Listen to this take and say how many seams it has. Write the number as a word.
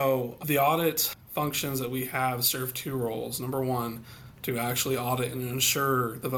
one